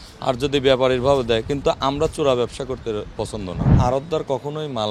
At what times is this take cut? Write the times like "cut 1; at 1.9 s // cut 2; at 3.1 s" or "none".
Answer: cut 1; at 3.8 s